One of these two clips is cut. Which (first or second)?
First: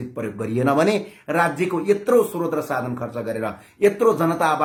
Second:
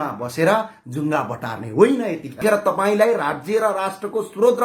second